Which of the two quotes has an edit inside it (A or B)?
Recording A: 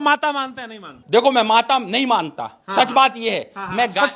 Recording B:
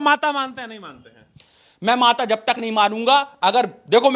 A